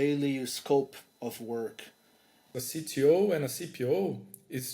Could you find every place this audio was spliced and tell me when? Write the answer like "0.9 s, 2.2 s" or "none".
2.5 s